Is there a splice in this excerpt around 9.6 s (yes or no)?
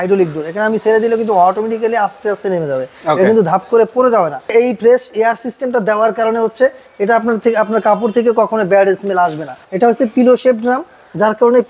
yes